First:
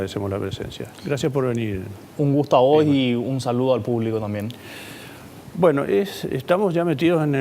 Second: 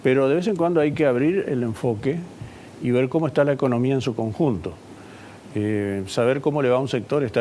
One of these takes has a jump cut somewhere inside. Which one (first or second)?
first